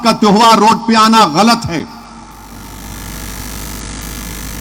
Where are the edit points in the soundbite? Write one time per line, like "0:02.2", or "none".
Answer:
none

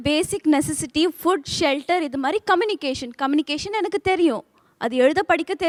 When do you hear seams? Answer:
none

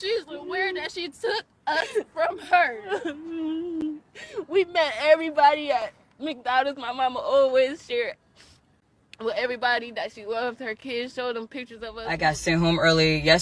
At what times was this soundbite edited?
0:12.0

